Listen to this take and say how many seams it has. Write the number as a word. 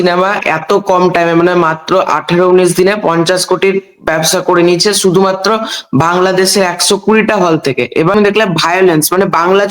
one